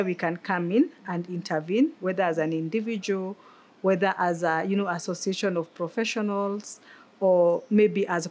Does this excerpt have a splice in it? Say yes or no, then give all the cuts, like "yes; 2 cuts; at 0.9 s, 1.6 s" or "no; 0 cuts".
no; 0 cuts